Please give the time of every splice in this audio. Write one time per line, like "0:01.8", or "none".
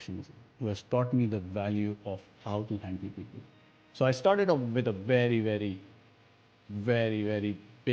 0:03.7

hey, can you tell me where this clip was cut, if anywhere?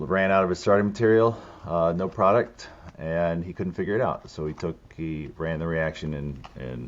none

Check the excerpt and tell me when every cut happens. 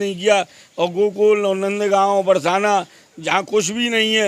none

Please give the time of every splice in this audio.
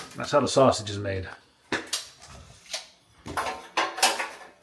none

